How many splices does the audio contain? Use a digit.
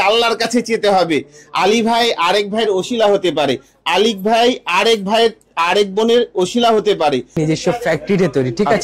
1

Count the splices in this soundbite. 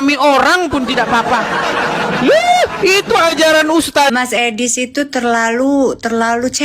1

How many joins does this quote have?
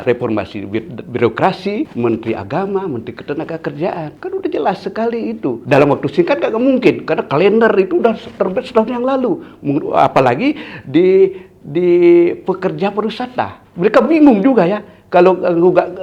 4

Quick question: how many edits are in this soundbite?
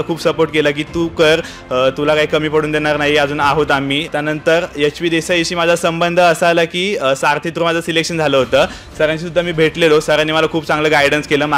2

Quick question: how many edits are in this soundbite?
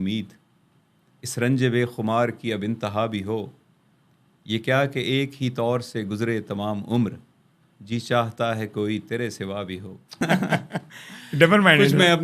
1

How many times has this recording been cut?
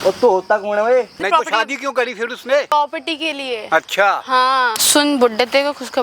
3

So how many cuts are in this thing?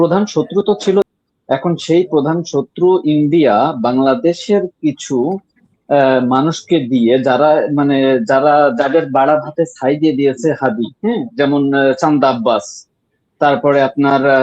1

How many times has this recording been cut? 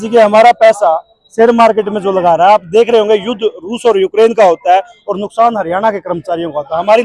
0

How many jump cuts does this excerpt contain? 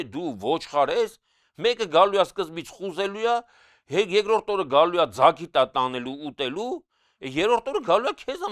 0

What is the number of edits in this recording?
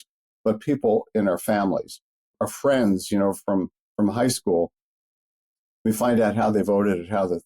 1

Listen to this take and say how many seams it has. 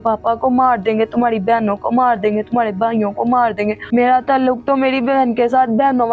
1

